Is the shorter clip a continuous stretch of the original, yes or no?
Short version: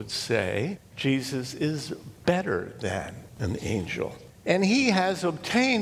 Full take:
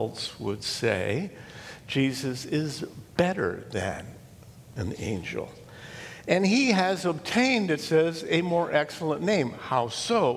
no